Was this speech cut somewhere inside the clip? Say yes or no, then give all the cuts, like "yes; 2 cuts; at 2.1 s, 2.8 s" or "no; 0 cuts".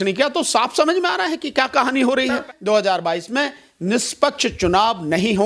yes; 1 cut; at 2.4 s